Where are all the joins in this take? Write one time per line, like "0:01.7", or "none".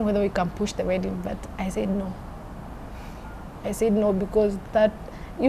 none